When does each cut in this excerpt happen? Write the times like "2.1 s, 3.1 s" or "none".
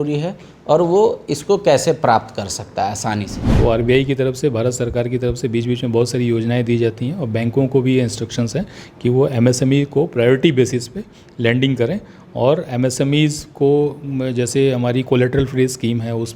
3.4 s